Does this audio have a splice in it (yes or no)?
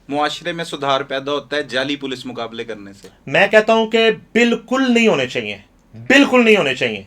no